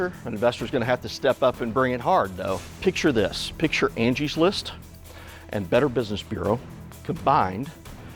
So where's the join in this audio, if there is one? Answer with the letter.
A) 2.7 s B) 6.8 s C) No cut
A